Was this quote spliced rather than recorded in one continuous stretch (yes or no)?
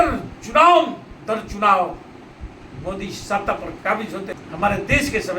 yes